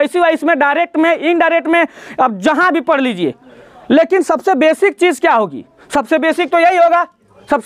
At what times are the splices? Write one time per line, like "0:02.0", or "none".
none